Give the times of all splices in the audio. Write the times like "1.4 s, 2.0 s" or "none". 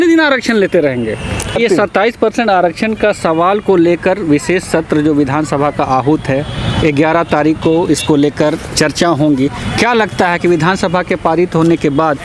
1.6 s